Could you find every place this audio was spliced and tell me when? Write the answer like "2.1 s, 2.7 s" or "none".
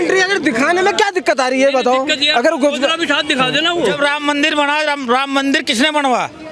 3.9 s